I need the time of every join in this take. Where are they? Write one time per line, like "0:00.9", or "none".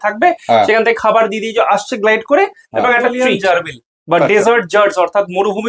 0:03.2

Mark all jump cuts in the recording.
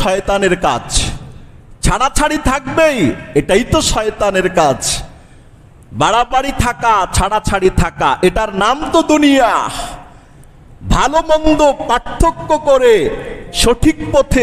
none

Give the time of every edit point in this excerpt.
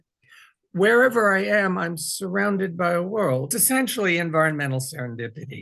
0:03.5

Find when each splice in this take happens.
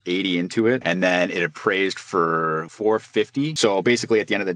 0:02.6
0:03.5

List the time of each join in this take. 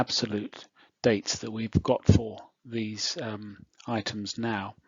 none

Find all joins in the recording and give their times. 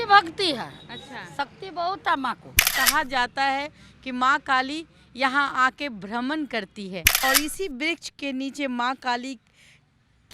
0:02.7
0:07.2

